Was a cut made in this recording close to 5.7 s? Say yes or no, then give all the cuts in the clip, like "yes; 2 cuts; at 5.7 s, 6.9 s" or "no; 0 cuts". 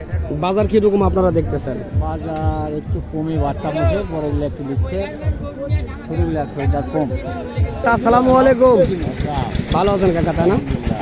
no; 1 cut; at 7.8 s